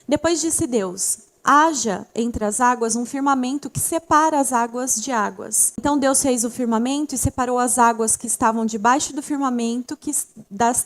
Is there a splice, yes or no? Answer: yes